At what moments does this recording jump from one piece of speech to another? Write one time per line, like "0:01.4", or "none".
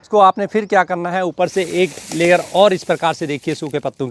none